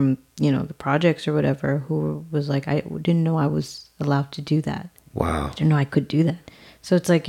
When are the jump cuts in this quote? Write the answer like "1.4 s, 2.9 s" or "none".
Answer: none

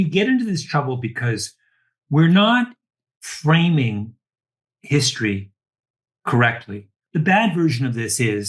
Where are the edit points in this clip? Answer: 7.0 s

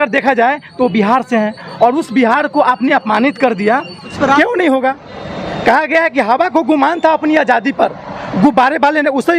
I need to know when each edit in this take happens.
4.1 s

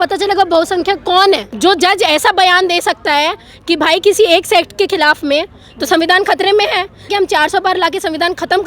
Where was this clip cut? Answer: 1.5 s, 7.1 s

